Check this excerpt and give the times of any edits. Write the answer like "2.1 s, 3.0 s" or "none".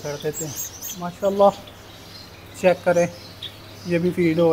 1.1 s